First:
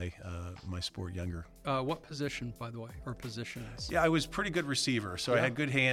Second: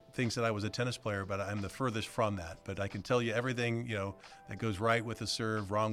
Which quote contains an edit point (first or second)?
first